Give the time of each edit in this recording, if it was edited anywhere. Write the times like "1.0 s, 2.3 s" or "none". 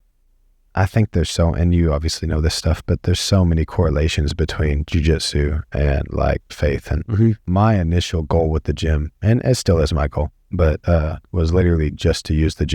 7.4 s